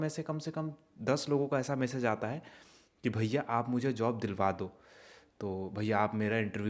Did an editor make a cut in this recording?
no; 0 cuts

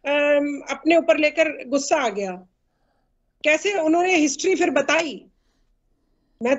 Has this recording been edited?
no; 0 cuts

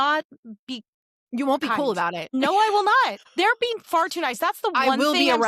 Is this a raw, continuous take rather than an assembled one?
no; 2 cuts; at 2.3 s, 3.2 s

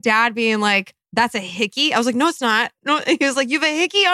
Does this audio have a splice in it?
yes; 1 cut; at 1.0 s

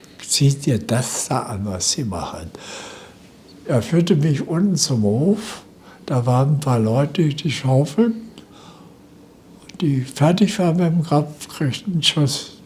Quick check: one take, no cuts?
yes; 0 cuts

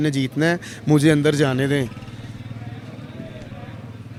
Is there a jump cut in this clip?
no; 0 cuts

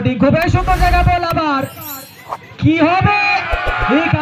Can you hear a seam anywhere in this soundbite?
no; 0 cuts

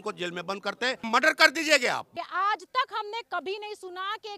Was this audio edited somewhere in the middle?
yes; 2 cuts; at 1.0 s, 2.1 s

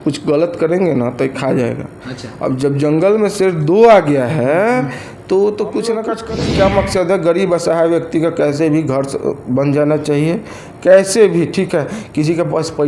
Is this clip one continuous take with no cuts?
no; 1 cut; at 6.2 s

